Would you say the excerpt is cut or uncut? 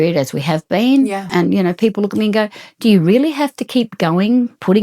cut